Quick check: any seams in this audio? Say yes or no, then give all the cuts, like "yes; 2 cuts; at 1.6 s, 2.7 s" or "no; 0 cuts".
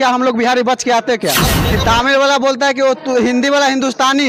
yes; 1 cut; at 1.5 s